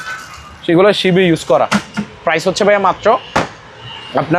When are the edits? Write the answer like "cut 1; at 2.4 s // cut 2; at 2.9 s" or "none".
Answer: none